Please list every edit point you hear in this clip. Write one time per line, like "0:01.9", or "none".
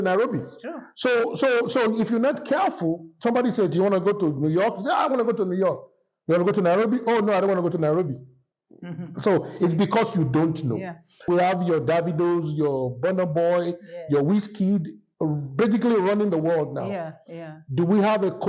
0:11.3

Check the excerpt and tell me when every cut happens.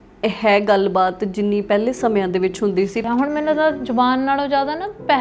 0:03.0

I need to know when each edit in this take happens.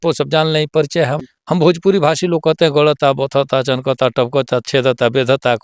0:01.3

